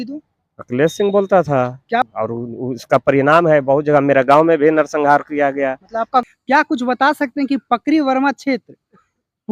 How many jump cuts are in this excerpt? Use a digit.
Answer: 2